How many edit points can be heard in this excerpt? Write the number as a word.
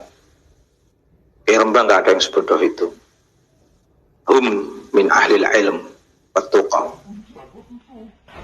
one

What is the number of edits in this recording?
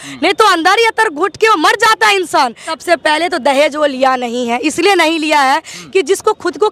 one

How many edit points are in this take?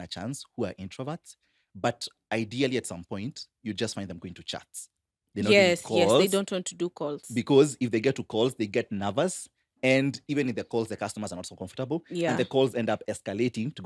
zero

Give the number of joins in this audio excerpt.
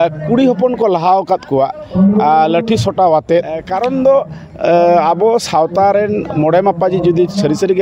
one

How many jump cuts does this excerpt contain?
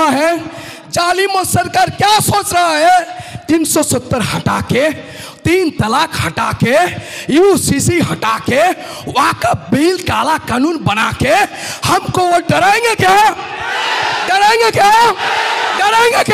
zero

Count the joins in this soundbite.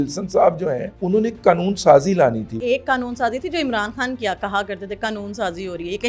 two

